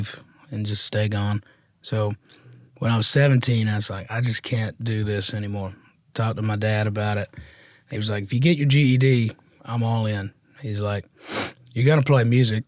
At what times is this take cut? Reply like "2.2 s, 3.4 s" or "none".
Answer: none